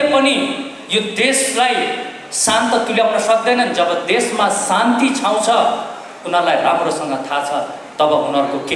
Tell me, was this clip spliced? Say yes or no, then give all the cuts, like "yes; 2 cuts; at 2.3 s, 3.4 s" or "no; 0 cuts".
no; 0 cuts